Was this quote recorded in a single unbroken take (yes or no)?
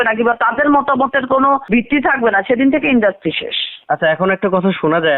yes